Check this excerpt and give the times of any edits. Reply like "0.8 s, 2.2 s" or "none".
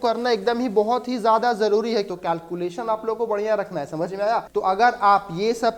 2.1 s, 4.5 s